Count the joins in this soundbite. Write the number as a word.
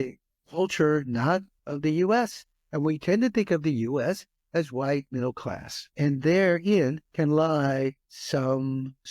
three